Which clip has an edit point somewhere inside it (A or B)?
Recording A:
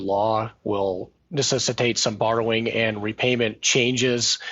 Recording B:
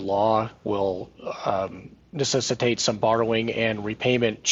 A